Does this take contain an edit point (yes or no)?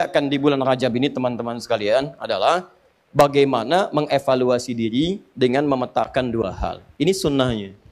no